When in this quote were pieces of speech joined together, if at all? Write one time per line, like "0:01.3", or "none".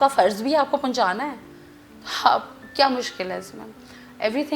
none